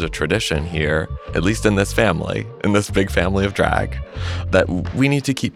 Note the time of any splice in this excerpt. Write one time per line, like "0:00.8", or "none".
none